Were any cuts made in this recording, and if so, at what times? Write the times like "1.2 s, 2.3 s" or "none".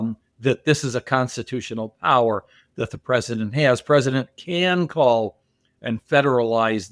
none